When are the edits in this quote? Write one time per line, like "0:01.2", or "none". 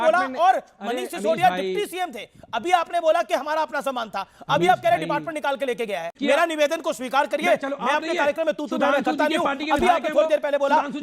0:06.1